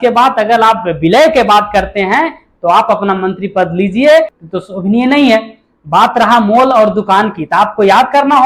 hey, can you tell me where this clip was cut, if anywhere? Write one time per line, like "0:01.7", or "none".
0:04.4